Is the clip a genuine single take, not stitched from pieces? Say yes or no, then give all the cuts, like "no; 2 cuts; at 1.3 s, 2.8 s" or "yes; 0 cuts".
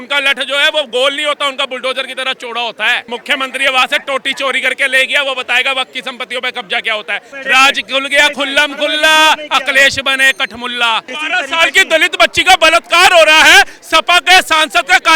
no; 3 cuts; at 3.1 s, 7.3 s, 11.2 s